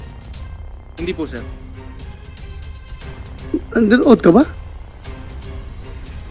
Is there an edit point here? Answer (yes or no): no